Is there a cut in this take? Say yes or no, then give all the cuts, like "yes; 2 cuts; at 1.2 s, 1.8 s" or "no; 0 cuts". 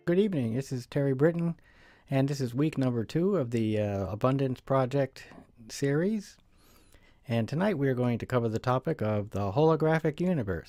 no; 0 cuts